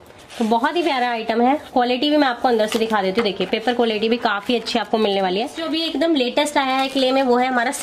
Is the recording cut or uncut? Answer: cut